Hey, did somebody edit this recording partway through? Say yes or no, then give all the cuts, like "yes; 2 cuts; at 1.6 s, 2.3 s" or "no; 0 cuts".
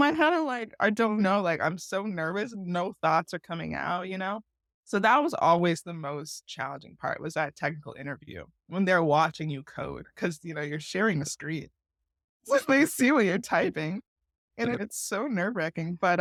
no; 0 cuts